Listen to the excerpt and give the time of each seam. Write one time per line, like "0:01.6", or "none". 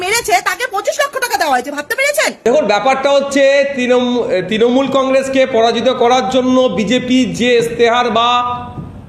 0:02.4